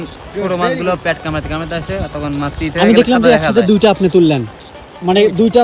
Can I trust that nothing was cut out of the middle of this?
yes; 0 cuts

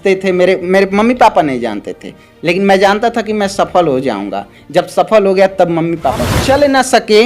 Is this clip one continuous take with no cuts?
no; 1 cut; at 6.3 s

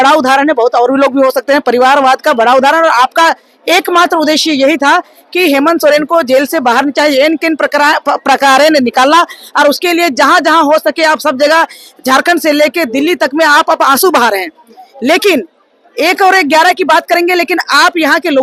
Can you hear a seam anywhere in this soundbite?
no; 0 cuts

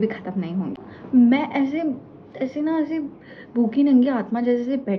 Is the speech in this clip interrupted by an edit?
yes; 1 cut; at 0.9 s

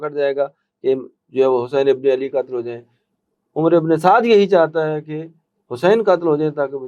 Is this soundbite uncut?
yes; 0 cuts

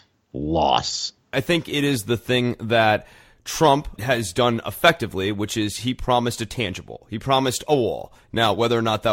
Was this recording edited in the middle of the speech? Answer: yes; 2 cuts; at 1.3 s, 3.9 s

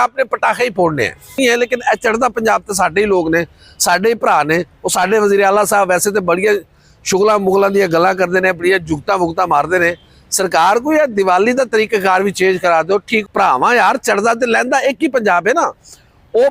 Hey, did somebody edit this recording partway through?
yes; 2 cuts; at 1.4 s, 13.2 s

